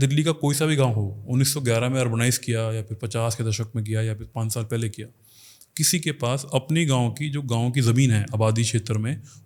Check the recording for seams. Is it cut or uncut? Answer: uncut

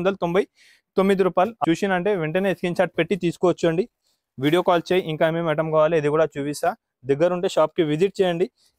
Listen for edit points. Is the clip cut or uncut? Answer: cut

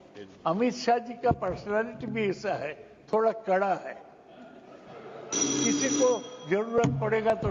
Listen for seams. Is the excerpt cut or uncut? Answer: uncut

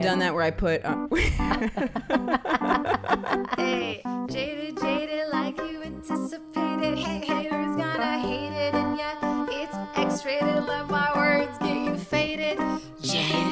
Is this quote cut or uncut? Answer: cut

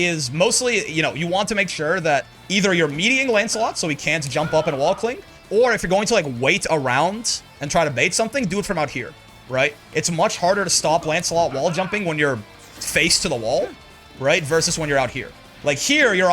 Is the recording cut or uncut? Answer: uncut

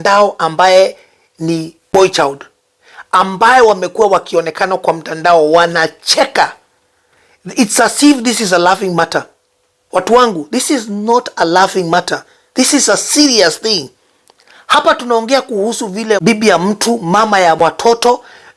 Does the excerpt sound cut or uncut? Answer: cut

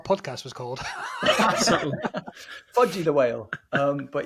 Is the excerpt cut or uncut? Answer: uncut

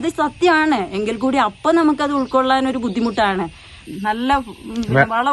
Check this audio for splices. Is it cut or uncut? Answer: cut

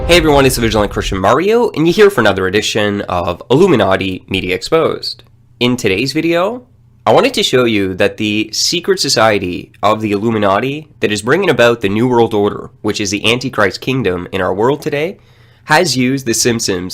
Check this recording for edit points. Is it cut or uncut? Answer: cut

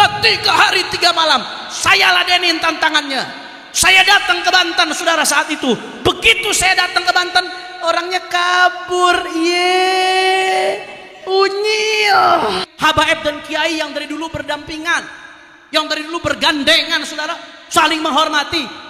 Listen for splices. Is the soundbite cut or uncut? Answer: cut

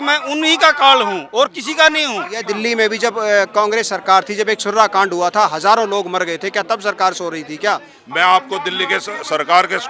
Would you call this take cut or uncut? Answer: cut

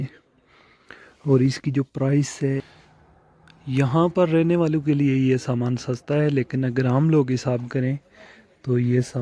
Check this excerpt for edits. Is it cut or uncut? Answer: cut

